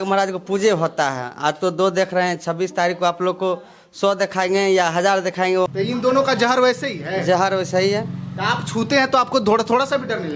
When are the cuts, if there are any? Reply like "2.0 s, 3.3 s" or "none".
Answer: 5.7 s

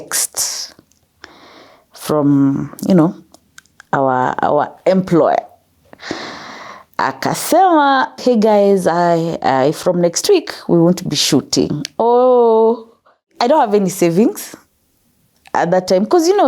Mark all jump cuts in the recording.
8.2 s, 13.3 s

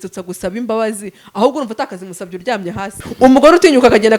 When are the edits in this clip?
3.0 s

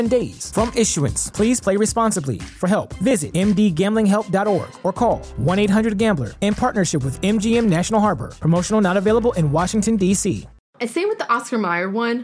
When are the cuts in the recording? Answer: 10.7 s

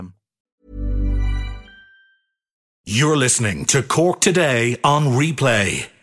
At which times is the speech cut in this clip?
2.8 s

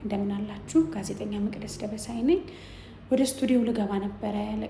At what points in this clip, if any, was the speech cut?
none

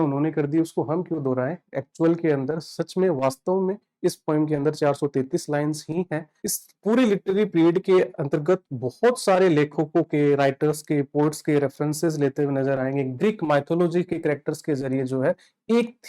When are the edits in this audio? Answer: 6.3 s

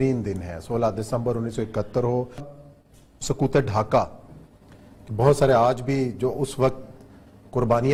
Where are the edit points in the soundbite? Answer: none

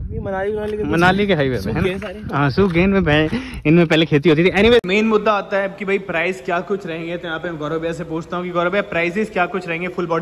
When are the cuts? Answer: 4.9 s

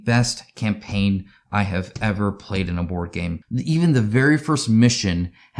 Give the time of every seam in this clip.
3.4 s

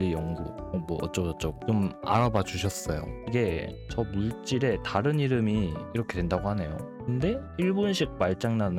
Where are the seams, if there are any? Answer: 3.1 s, 5.8 s

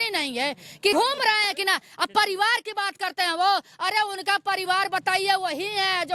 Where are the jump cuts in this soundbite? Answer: 0.9 s

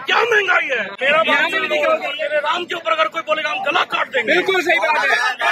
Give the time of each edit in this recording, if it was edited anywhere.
0.9 s, 2.1 s

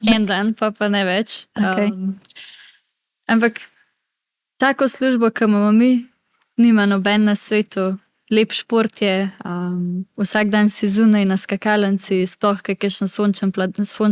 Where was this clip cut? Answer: none

